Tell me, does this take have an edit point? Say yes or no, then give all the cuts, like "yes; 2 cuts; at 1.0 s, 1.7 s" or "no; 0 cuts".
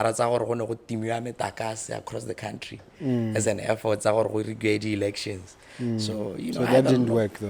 no; 0 cuts